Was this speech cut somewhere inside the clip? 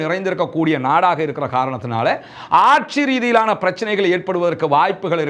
no; 0 cuts

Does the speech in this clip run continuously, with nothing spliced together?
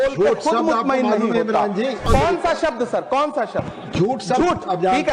no; 1 cut; at 2.0 s

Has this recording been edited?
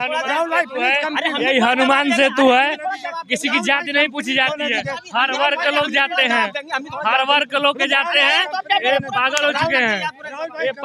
no; 0 cuts

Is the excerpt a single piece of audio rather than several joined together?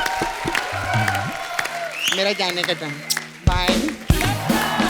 yes; 0 cuts

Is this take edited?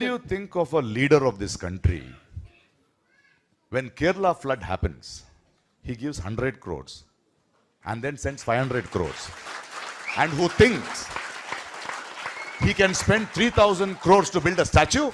no; 0 cuts

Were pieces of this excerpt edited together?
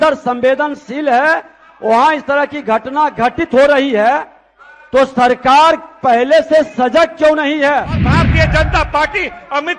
yes; 1 cut; at 8.1 s

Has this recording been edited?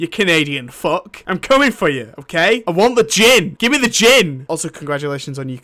yes; 4 cuts; at 1.1 s, 2.6 s, 3.5 s, 4.4 s

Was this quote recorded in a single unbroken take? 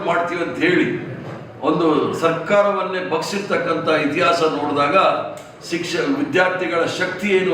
yes; 0 cuts

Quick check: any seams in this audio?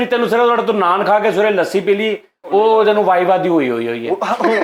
no; 0 cuts

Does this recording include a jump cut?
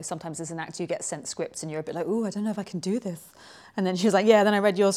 no; 0 cuts

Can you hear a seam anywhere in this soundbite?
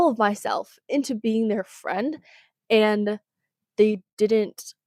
no; 0 cuts

